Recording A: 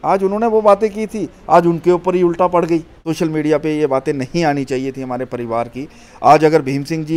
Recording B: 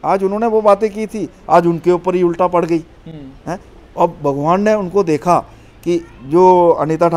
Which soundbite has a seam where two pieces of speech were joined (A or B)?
A